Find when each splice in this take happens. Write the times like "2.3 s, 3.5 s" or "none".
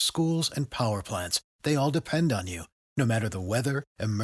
none